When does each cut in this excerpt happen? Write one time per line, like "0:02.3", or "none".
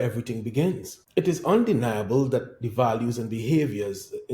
0:00.9